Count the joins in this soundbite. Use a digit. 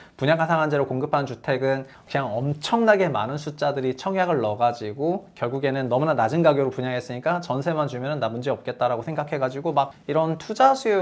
2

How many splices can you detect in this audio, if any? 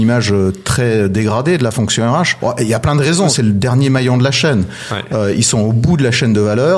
2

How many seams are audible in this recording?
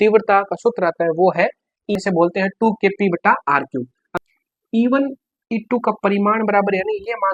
2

